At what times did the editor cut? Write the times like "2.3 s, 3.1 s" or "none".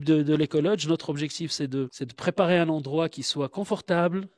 2.0 s